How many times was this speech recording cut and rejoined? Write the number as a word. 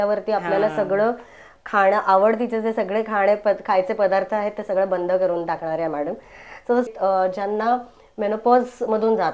one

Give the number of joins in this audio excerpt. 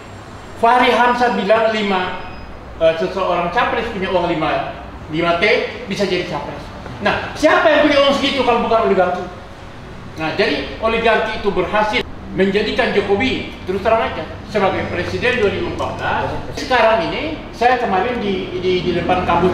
two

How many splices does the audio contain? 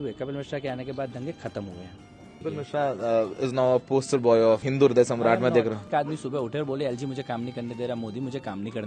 three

